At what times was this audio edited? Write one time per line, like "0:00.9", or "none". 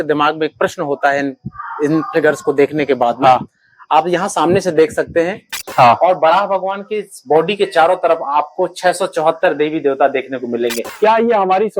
0:05.6
0:10.8